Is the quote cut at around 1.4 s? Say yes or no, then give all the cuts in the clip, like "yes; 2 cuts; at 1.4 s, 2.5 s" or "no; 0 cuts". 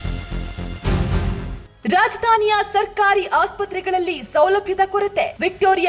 yes; 1 cut; at 1.4 s